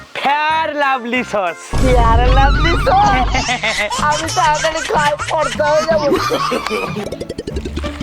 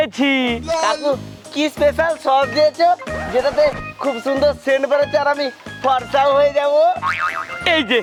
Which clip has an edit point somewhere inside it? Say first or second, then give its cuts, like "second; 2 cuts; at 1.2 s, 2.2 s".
first; 1 cut; at 7.1 s